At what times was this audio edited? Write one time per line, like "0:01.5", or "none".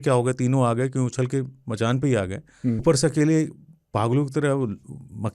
0:02.8